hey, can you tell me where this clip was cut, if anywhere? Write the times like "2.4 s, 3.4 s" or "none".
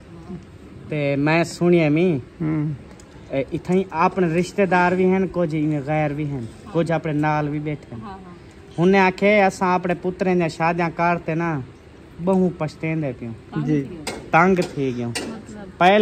13.9 s